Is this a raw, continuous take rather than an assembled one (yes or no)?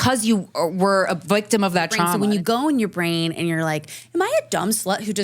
no